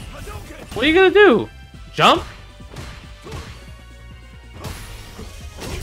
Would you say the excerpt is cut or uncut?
uncut